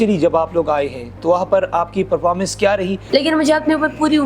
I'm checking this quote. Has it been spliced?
yes; 1 cut; at 3.0 s

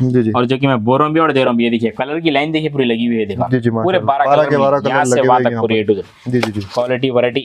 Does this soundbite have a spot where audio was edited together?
no; 0 cuts

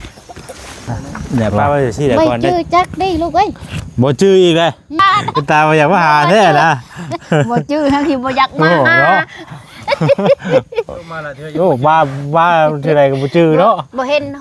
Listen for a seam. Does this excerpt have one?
yes; 2 cuts; at 2.2 s, 5.0 s

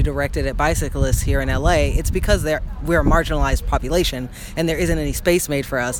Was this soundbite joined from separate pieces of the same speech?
no; 0 cuts

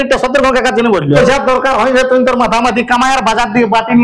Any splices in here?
yes; 1 cut; at 1.2 s

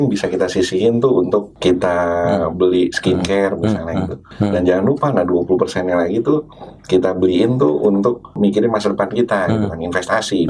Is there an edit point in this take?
yes; 3 cuts; at 1.5 s, 4.3 s, 8.3 s

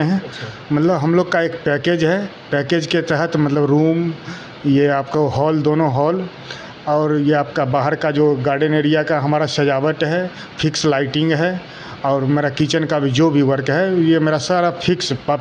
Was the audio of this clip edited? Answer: no; 0 cuts

